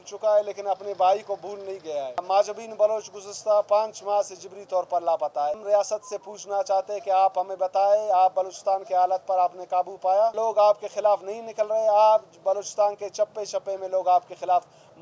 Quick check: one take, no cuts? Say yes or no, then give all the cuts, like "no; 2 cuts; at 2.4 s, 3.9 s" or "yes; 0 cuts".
no; 3 cuts; at 2.2 s, 5.6 s, 10.4 s